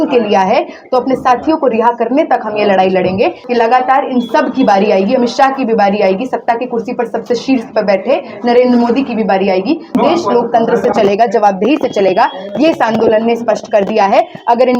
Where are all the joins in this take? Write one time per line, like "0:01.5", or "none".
0:03.4
0:10.0